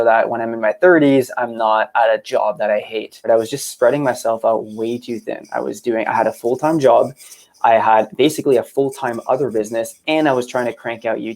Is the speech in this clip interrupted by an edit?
yes; 1 cut; at 3.3 s

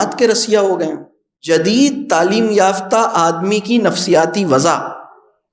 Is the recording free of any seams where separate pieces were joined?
no; 1 cut; at 1.4 s

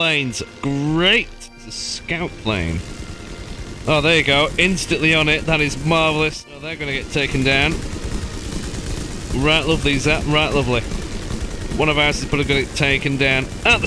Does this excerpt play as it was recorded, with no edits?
no; 2 cuts; at 1.5 s, 6.9 s

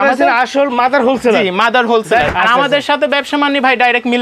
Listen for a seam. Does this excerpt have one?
yes; 1 cut; at 2.3 s

